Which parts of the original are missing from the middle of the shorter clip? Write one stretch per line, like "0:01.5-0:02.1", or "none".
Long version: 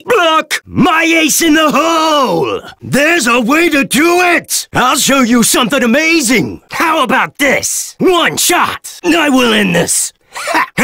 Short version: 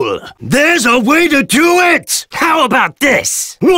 0:04.6-0:06.6

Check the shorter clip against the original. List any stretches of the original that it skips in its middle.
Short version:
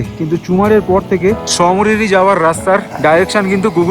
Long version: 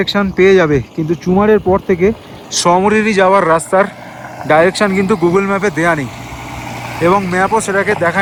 0:02.2-0:02.5
0:04.0-0:04.4

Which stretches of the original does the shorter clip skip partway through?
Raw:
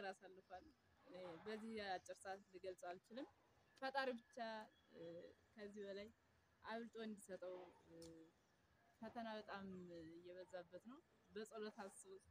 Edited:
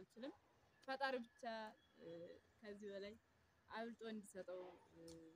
none

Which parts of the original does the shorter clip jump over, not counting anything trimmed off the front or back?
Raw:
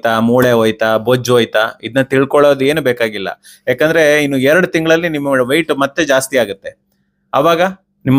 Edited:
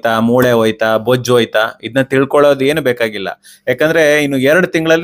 none

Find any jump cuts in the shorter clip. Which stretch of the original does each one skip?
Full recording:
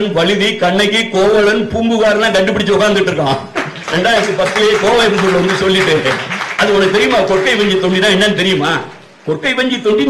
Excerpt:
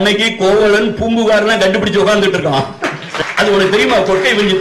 0:03.8-0:06.3

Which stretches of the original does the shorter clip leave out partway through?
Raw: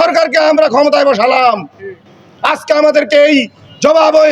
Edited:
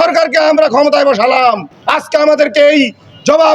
0:01.7-0:02.3

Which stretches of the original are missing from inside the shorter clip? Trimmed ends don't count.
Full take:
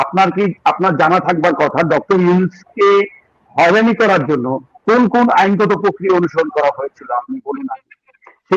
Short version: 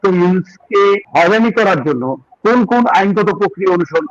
0:03.1-0:03.5

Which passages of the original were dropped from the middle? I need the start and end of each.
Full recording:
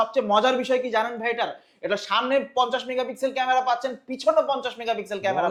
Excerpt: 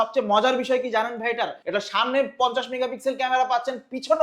0:01.6-0:01.8

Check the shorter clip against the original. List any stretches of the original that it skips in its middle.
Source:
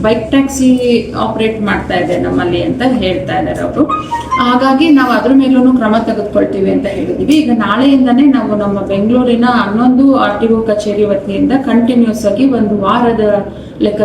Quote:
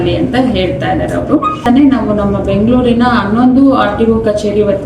0:04.1-0:08.1

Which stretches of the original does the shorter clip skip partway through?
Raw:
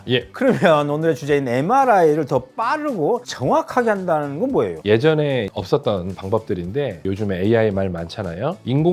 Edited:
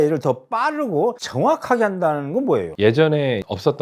none

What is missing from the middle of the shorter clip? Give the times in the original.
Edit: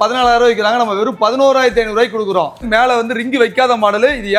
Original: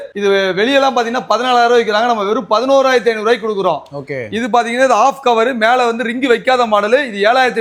0:03.9-0:05.5

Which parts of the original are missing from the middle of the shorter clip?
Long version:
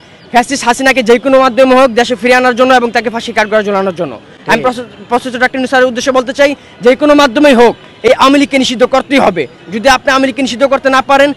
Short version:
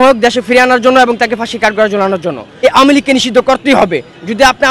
0:04.4-0:08.1

